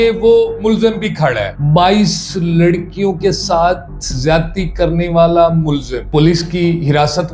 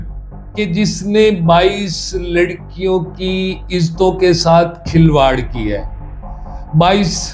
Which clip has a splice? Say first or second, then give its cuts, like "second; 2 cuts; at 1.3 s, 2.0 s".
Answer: first; 1 cut; at 1.5 s